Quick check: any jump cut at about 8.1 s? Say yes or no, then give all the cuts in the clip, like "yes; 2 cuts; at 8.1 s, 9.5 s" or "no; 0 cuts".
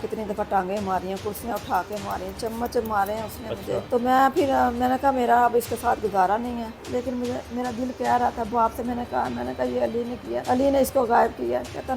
no; 1 cut; at 6.8 s